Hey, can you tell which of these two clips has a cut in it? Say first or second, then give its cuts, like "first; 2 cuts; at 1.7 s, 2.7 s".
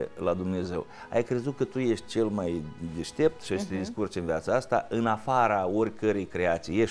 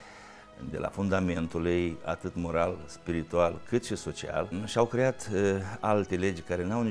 second; 1 cut; at 4.6 s